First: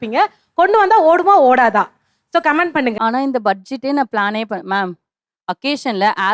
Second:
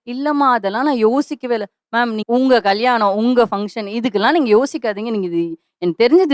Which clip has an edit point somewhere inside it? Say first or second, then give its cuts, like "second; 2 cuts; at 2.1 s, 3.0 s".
first; 1 cut; at 3.0 s